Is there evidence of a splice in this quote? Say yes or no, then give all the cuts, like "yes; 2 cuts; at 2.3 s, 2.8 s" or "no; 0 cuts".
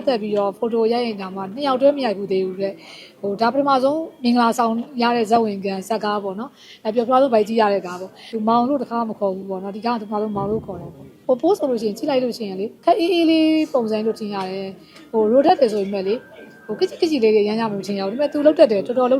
yes; 3 cuts; at 8.3 s, 11.1 s, 12.7 s